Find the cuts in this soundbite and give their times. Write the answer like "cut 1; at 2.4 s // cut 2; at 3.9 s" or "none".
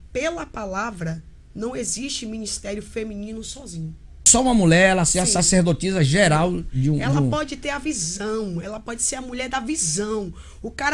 cut 1; at 4.3 s